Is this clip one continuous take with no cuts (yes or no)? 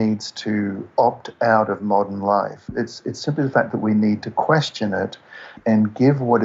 no